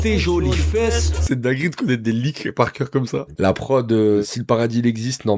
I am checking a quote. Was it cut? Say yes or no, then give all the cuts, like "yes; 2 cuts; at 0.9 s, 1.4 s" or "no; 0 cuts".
yes; 3 cuts; at 1.1 s, 3.3 s, 4.2 s